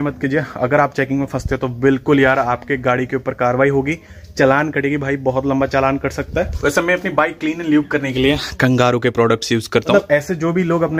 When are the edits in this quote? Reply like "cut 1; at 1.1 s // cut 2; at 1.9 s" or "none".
cut 1; at 6.5 s // cut 2; at 9.9 s